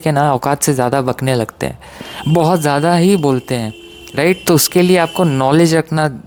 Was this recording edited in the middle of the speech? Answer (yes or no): no